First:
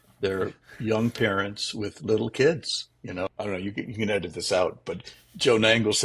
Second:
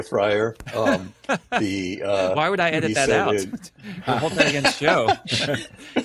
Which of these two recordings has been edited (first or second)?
first